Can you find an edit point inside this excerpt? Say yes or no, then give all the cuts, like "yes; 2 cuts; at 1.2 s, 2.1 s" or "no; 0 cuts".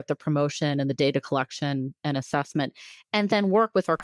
yes; 1 cut; at 2.0 s